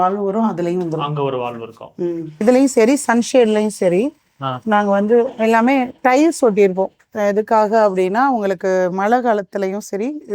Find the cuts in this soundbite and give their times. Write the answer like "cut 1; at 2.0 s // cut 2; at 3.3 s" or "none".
cut 1; at 2.3 s